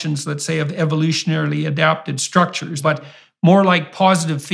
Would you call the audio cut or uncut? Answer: cut